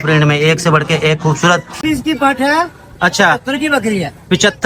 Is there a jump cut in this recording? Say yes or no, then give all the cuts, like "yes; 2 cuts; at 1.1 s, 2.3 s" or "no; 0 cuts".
yes; 1 cut; at 1.8 s